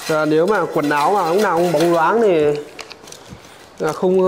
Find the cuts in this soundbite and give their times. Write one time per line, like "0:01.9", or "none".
none